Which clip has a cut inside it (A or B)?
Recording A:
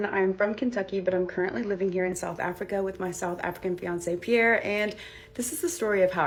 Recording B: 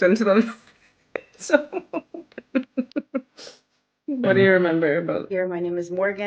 B